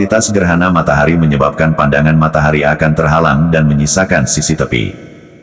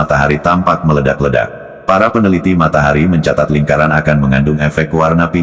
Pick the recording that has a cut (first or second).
second